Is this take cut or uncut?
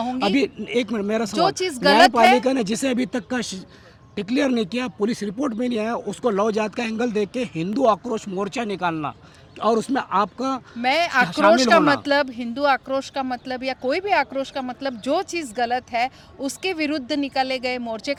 uncut